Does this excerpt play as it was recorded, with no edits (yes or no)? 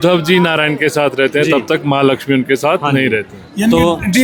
yes